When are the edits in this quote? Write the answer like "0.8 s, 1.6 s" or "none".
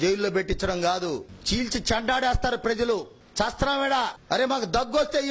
1.3 s, 3.2 s, 4.2 s